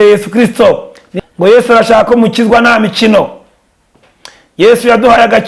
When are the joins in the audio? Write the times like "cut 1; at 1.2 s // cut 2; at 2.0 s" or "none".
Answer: cut 1; at 1.1 s